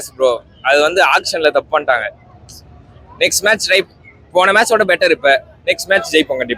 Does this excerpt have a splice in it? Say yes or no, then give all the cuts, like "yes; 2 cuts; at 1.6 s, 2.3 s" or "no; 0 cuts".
no; 0 cuts